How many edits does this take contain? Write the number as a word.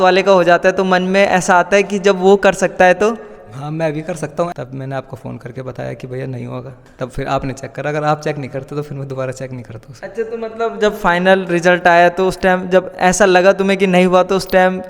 one